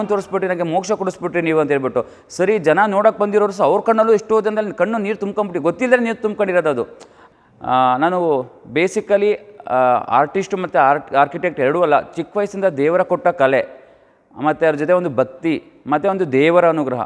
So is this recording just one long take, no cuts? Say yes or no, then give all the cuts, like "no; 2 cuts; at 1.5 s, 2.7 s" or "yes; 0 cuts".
no; 1 cut; at 7.3 s